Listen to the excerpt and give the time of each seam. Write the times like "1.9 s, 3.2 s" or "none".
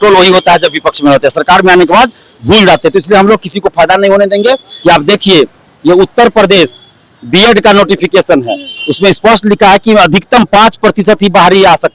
4.7 s